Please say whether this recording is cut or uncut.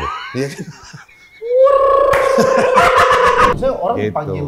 cut